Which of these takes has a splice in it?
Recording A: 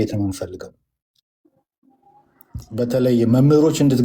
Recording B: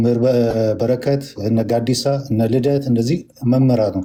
A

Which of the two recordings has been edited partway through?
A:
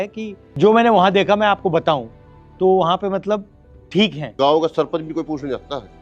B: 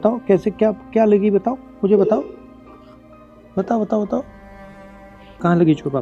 A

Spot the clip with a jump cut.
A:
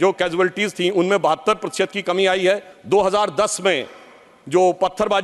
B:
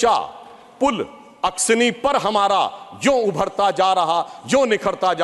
A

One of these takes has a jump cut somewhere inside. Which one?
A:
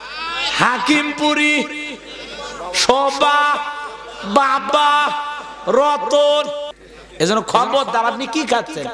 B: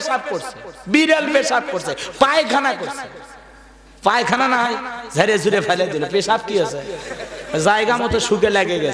A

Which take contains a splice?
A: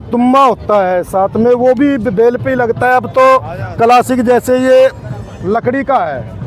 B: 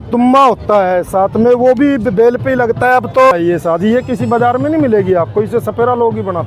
B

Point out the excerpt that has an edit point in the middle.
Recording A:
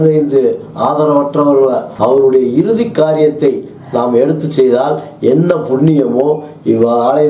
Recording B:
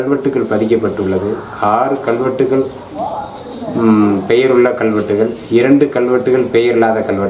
A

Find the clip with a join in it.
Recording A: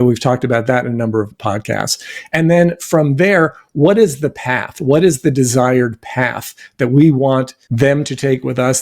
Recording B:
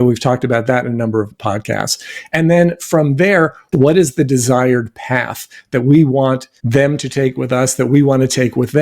B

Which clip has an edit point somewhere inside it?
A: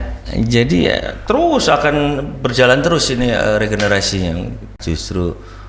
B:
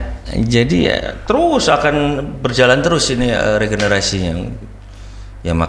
A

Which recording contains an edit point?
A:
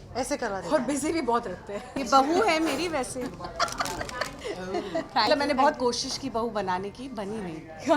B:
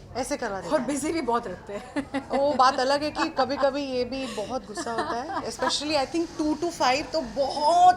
A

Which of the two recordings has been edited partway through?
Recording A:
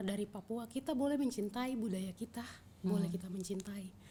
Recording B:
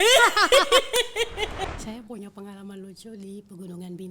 B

